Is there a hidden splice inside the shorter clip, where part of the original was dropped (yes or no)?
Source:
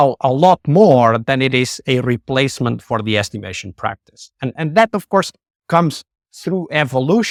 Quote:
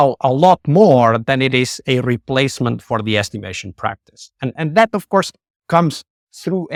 no